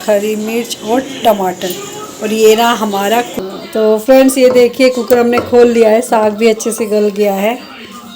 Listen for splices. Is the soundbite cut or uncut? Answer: cut